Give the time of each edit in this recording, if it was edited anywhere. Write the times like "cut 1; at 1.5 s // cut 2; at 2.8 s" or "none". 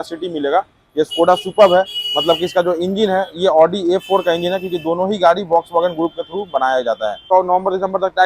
cut 1; at 7.2 s